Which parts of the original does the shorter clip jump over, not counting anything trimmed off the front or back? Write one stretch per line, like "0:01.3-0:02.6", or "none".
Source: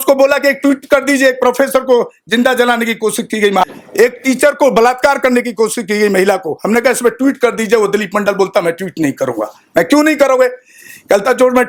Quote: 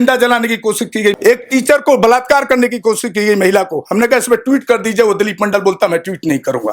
0:03.5-0:03.9